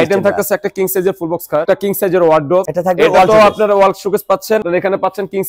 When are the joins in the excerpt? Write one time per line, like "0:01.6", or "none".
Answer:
0:01.6
0:02.6
0:04.6